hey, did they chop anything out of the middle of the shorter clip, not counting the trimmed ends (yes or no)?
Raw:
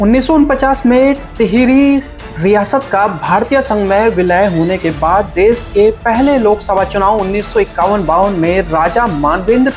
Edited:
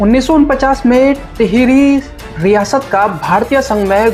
no